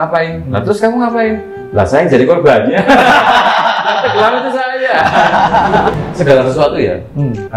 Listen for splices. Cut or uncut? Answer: cut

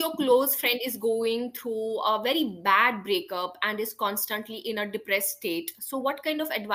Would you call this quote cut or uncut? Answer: uncut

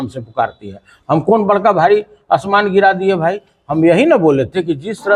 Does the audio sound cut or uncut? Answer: uncut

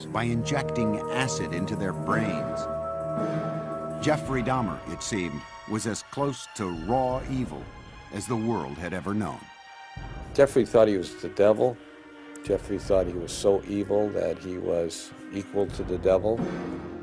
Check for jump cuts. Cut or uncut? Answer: uncut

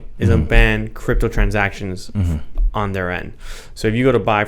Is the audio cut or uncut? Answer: uncut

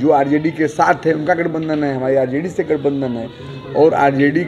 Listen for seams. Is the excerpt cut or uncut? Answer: uncut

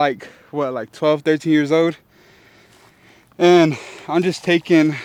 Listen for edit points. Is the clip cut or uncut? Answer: uncut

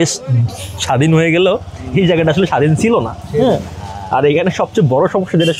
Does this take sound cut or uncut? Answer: uncut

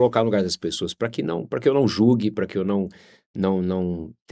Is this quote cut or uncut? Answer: uncut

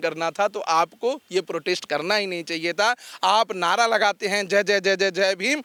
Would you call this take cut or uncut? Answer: uncut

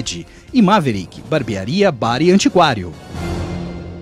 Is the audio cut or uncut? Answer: cut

